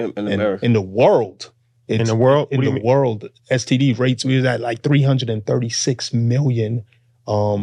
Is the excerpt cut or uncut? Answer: uncut